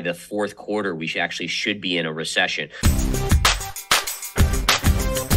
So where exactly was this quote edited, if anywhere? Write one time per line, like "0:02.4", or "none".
0:02.8